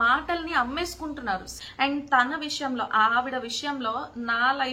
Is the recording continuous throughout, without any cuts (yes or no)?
no